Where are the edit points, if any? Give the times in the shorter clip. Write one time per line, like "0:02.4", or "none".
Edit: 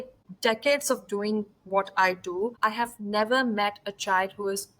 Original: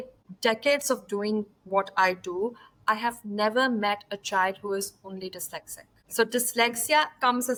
0:02.5